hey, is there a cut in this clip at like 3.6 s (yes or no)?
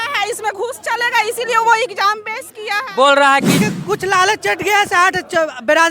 yes